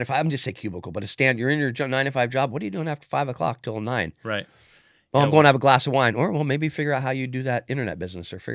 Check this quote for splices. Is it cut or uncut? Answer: uncut